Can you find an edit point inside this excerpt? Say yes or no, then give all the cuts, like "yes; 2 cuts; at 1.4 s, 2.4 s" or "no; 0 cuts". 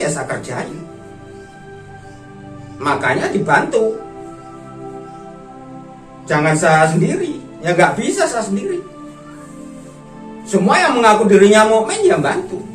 yes; 4 cuts; at 4.6 s, 6.3 s, 9.0 s, 10.5 s